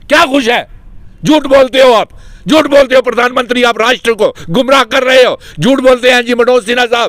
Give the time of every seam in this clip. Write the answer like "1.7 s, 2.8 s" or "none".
none